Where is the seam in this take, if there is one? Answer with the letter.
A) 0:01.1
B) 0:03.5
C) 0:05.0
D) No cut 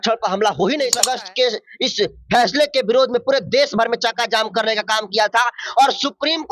A